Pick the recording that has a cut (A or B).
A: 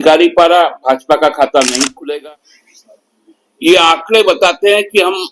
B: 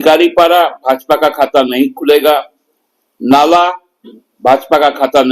A